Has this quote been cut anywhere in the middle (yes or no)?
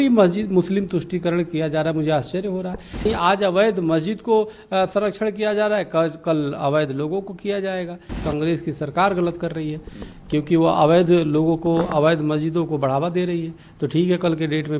yes